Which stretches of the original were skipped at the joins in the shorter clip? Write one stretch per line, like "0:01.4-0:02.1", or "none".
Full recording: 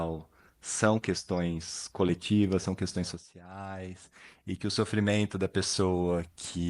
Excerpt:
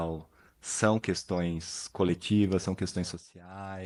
none